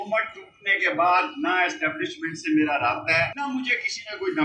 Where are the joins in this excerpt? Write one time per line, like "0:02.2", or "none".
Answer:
0:03.4